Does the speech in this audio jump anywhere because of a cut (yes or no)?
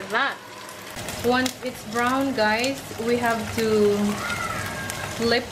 yes